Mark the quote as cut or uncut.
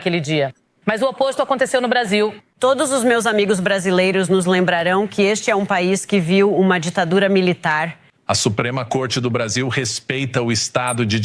cut